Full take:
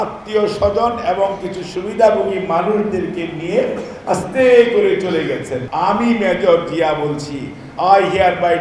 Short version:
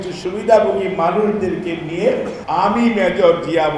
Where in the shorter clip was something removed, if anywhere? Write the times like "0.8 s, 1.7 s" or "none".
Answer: 2.4 s